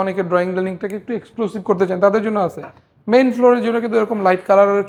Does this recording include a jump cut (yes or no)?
no